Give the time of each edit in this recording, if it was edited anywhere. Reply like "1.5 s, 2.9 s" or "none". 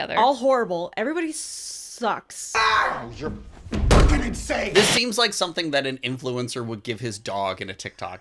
2.5 s, 4.7 s